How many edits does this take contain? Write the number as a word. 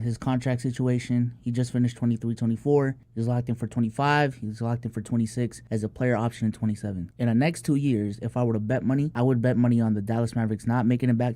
two